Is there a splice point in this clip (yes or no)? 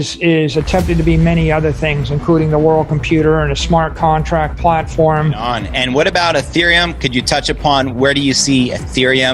yes